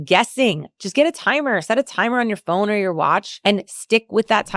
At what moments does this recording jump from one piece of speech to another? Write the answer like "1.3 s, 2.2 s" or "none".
3.3 s

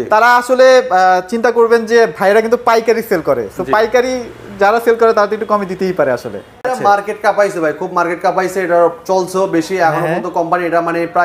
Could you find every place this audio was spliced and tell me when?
6.7 s

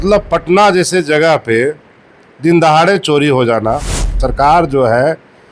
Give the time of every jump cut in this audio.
4.2 s

